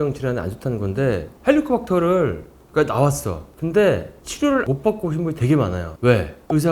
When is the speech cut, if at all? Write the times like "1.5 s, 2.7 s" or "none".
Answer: 1.3 s